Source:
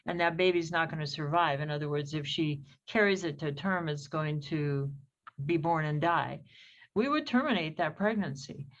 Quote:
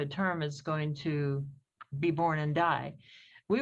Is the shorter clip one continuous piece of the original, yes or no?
yes